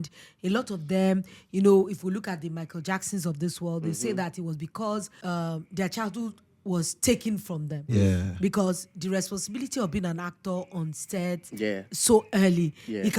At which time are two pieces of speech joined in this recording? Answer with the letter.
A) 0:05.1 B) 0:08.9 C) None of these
A